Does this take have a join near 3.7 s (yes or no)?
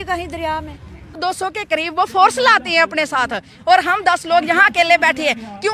no